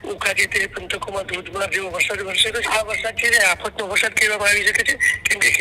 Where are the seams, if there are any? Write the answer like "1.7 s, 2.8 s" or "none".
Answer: 2.6 s

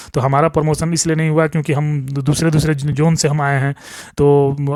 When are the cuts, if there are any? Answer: none

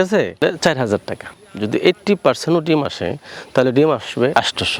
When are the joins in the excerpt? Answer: 1.2 s

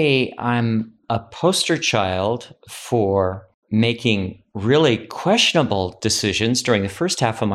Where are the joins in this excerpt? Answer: 1.0 s, 3.5 s

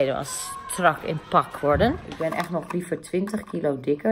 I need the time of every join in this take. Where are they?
2.1 s

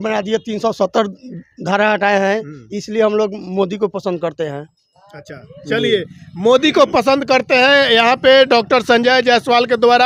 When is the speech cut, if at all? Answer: none

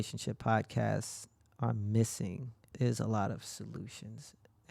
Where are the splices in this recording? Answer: 2.7 s

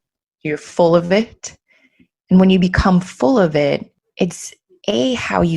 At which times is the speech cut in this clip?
4.0 s

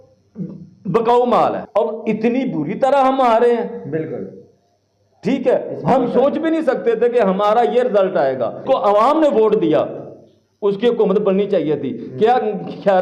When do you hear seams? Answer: 1.6 s, 8.6 s

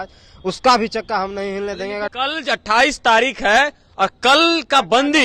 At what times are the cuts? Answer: 2.1 s

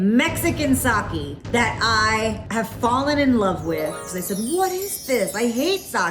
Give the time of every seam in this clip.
1.4 s, 2.4 s, 4.1 s

